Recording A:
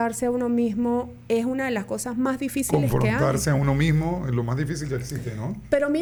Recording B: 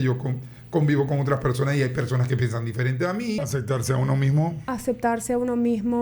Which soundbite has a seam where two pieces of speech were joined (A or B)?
B